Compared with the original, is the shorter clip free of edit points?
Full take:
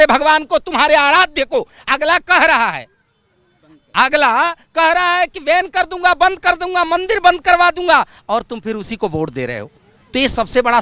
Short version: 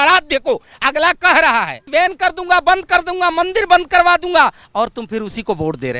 no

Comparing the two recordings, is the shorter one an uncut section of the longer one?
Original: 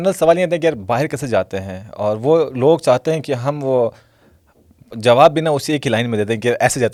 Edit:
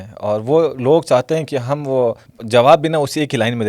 no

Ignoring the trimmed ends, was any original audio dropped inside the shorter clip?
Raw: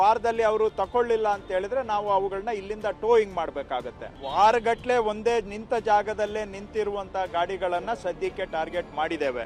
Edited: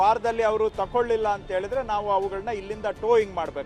no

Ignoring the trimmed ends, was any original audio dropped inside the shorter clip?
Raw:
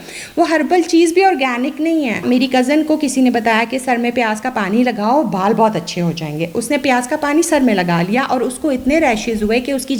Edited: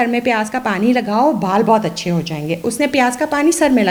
no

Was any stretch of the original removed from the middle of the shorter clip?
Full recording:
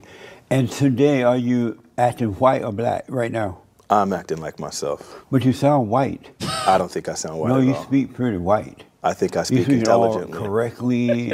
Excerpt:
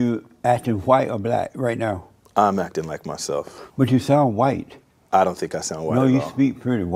no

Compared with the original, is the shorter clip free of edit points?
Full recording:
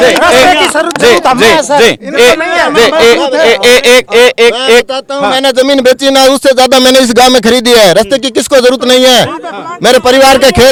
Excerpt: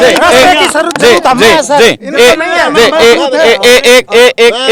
yes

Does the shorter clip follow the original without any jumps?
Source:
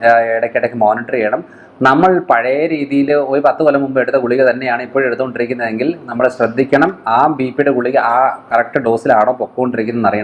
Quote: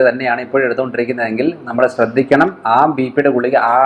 yes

